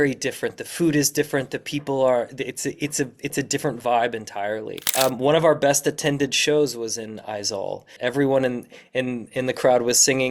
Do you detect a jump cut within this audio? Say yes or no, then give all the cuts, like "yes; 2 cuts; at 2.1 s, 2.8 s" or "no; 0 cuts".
yes; 2 cuts; at 4.8 s, 7.9 s